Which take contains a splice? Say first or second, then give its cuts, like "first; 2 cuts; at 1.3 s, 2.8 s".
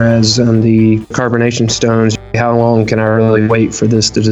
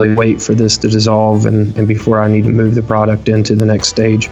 first; 2 cuts; at 1.1 s, 2.3 s